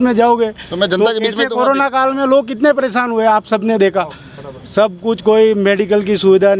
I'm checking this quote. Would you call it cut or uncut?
uncut